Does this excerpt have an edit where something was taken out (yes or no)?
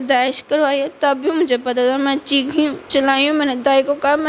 no